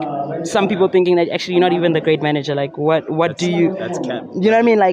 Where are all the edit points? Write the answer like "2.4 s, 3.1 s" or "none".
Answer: 3.4 s